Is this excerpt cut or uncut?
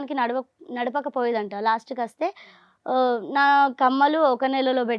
uncut